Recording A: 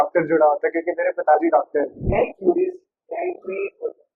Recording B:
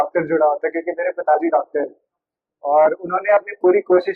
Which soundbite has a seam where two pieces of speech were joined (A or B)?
A